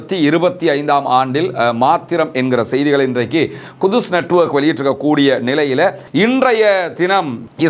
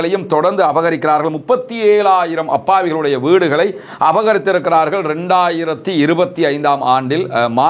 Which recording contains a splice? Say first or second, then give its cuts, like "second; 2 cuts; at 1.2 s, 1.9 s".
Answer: first; 1 cut; at 6.0 s